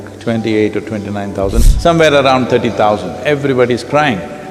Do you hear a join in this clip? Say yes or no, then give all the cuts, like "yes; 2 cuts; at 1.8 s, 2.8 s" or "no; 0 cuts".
yes; 1 cut; at 1.6 s